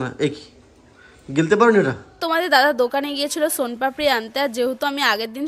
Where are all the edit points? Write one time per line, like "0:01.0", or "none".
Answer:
0:02.2